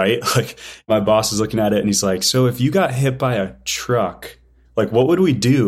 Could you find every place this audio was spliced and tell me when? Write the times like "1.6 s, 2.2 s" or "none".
none